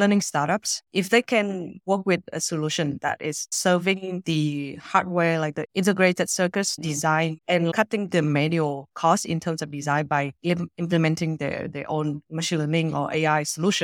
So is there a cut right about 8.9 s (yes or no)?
yes